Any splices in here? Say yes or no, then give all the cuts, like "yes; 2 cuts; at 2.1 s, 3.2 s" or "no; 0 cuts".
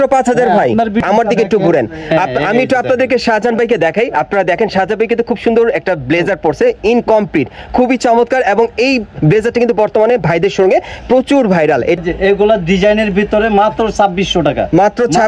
yes; 2 cuts; at 1.0 s, 12.0 s